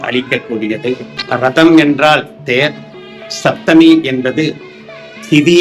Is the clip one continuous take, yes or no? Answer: no